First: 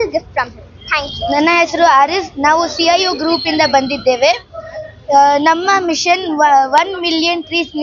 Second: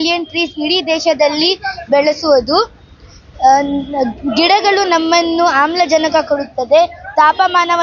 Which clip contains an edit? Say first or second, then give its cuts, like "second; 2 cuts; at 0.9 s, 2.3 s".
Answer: first; 1 cut; at 1.2 s